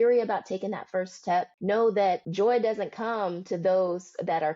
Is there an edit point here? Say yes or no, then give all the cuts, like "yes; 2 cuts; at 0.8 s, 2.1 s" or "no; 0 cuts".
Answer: yes; 2 cuts; at 1.5 s, 2.3 s